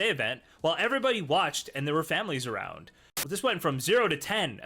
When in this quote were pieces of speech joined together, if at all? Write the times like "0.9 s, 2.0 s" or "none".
3.1 s

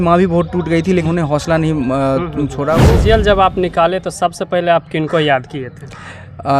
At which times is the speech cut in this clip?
1.1 s, 2.8 s

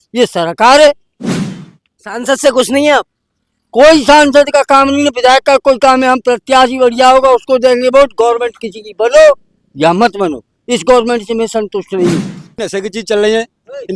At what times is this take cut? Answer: 12.6 s

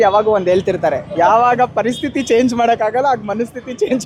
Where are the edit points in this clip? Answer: none

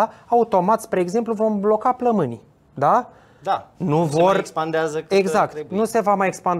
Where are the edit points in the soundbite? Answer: none

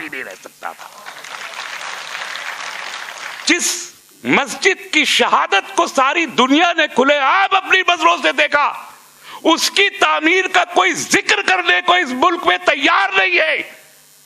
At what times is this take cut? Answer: 3.4 s

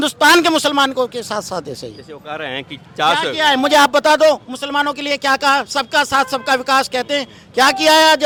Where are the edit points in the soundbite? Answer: none

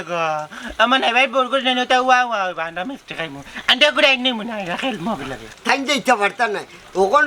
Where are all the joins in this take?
5.5 s

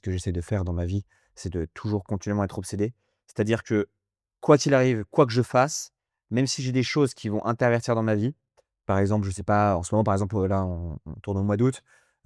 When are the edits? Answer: none

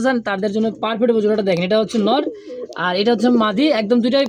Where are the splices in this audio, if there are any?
none

